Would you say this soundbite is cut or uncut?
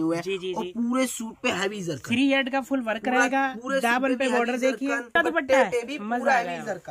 cut